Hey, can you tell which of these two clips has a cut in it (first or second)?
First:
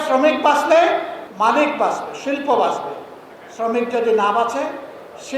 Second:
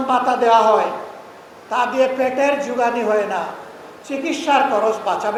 first